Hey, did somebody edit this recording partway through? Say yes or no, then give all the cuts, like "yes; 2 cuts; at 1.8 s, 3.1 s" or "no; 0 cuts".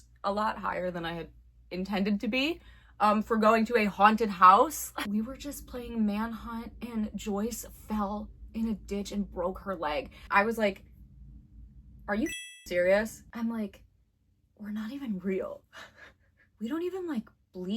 yes; 2 cuts; at 4.9 s, 13.2 s